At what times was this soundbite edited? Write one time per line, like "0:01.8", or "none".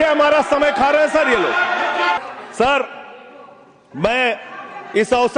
0:02.2